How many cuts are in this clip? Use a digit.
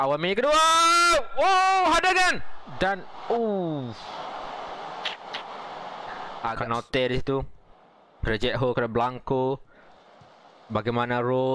1